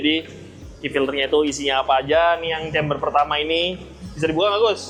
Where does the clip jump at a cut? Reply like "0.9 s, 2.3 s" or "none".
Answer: none